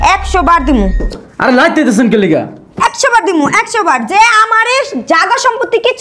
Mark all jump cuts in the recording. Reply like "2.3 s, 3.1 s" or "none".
none